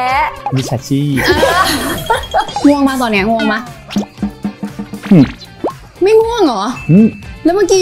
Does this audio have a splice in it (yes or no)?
yes